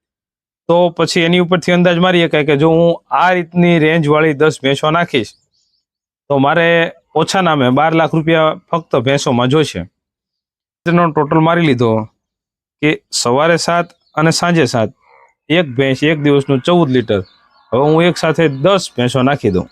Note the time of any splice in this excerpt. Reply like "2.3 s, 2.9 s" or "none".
10.8 s